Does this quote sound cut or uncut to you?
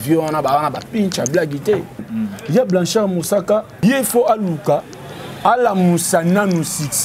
cut